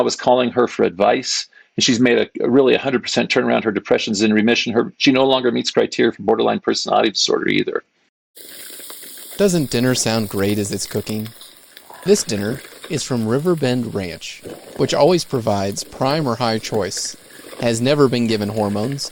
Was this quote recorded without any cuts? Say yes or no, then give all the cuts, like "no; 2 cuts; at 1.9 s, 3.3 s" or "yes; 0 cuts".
no; 1 cut; at 7.9 s